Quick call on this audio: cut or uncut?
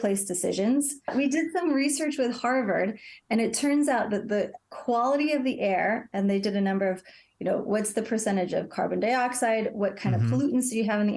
cut